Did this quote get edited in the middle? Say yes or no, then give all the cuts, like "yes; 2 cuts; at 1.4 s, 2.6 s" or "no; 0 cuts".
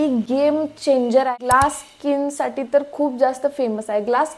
yes; 1 cut; at 1.3 s